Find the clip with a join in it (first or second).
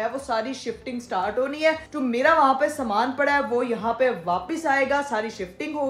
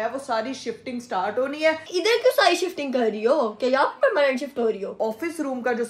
second